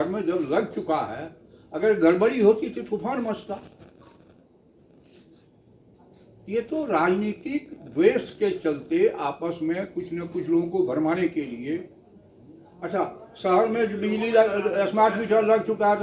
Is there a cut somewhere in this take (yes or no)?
no